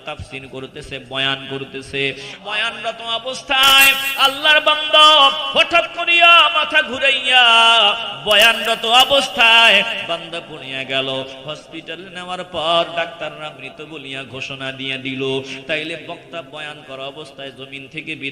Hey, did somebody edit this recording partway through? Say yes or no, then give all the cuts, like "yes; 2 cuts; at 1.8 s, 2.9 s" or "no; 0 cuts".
yes; 1 cut; at 2.4 s